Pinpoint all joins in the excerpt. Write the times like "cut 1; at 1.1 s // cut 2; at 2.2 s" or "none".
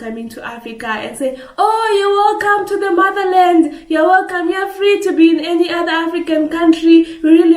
none